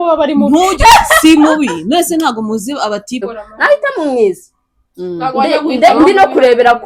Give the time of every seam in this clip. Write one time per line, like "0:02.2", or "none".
0:03.2